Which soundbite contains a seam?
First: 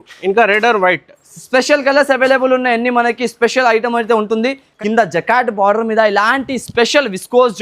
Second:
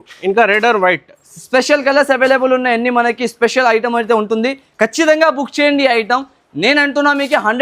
first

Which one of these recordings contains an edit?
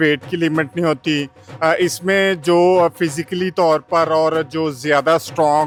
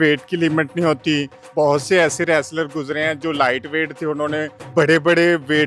second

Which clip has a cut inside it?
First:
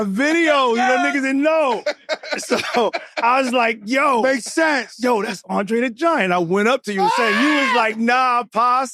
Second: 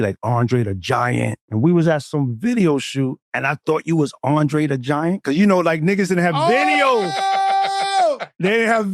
second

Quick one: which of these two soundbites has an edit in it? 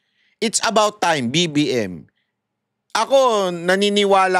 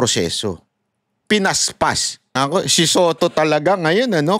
second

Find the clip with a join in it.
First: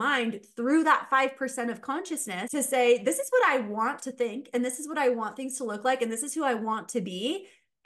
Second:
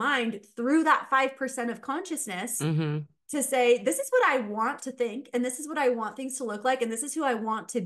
first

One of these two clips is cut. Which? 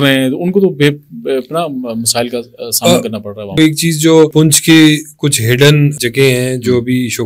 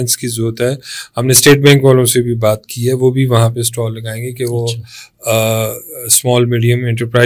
first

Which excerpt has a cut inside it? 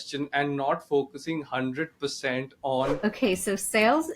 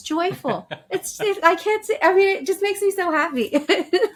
first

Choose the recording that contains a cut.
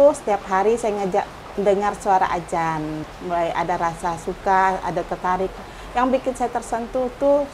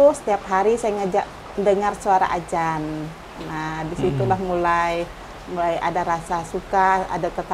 first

